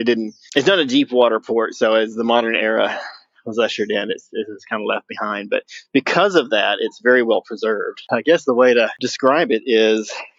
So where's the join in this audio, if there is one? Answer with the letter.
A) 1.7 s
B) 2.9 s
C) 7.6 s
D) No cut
D